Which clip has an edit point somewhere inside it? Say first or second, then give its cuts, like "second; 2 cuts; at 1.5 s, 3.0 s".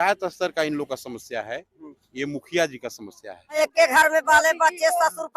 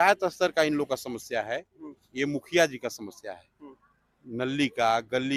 first; 1 cut; at 3.6 s